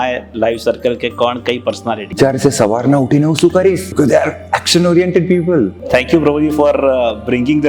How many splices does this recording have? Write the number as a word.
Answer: three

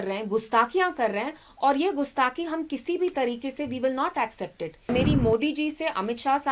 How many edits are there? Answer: one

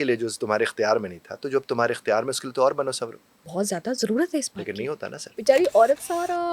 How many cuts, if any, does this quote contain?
one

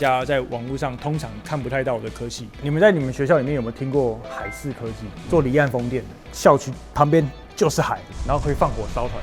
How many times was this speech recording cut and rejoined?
two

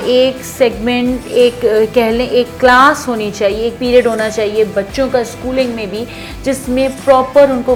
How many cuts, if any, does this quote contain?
zero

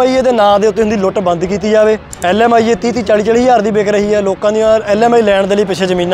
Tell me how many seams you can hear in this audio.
one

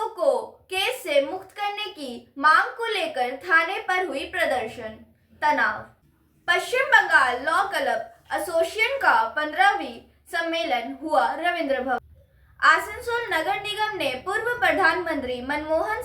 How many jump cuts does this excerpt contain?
two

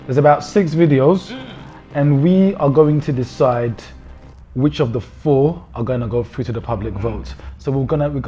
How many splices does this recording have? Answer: zero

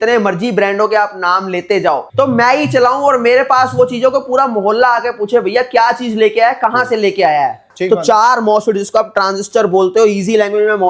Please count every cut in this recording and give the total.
two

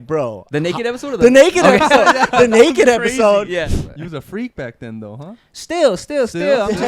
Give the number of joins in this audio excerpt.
one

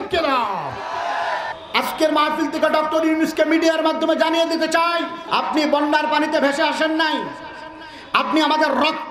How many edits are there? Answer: two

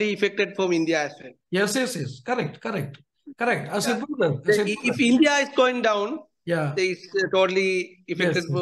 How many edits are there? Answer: zero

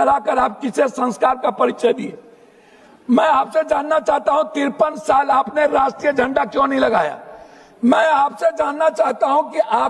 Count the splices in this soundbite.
zero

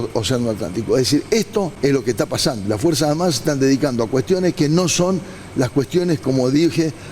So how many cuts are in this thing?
one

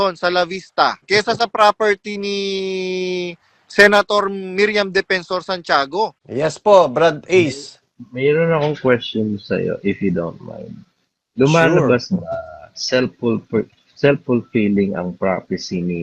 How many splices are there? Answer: two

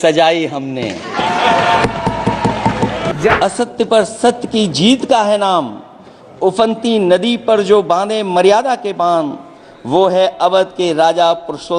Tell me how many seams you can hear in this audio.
one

